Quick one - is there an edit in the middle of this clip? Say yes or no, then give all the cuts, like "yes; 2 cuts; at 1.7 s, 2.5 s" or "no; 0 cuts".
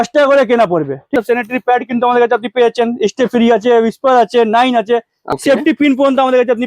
yes; 2 cuts; at 1.1 s, 5.2 s